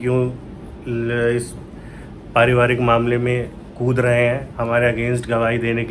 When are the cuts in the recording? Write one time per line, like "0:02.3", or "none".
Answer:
none